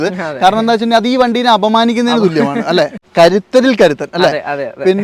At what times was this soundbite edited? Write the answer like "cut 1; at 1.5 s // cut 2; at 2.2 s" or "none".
cut 1; at 3.0 s